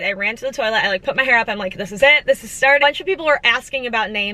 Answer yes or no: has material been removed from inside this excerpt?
yes